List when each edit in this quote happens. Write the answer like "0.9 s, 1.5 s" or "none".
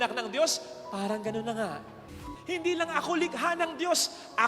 2.2 s

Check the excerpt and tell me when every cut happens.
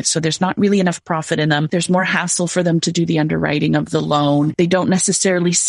1.7 s, 4.5 s

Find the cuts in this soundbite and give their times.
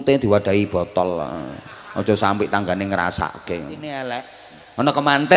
4.0 s

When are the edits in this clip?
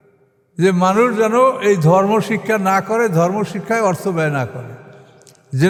none

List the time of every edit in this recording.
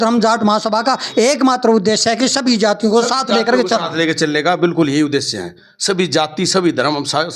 none

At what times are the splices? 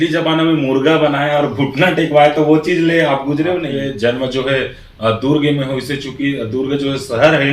3.7 s

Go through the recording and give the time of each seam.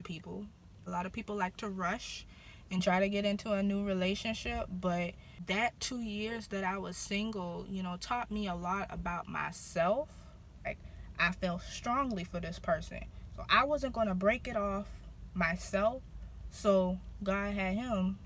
0.9 s, 5.3 s, 10.6 s

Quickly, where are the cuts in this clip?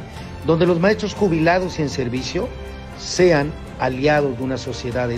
none

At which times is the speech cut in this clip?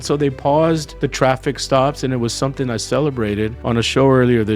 1.0 s, 3.6 s

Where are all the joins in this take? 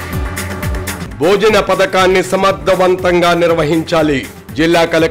0.9 s

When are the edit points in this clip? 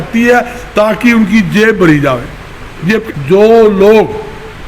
3.0 s

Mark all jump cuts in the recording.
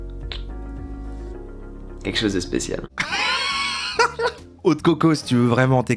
none

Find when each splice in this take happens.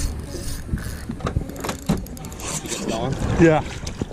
2.7 s

